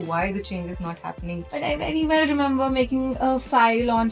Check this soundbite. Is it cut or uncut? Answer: cut